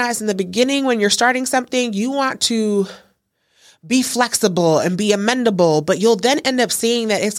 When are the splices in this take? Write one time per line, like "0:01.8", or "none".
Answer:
none